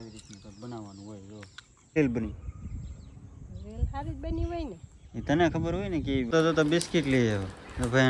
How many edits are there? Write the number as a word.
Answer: two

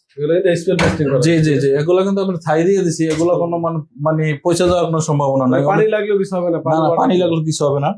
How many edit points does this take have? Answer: zero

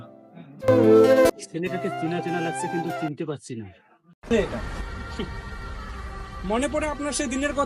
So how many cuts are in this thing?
two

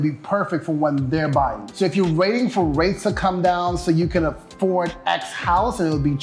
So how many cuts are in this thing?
one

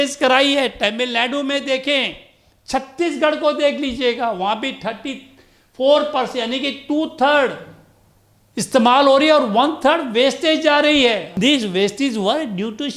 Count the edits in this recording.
one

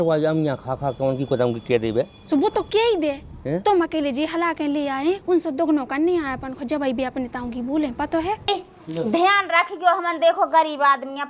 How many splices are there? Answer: one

